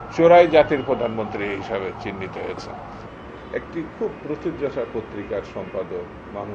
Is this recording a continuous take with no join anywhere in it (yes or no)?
yes